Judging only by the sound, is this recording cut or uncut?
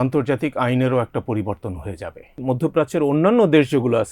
cut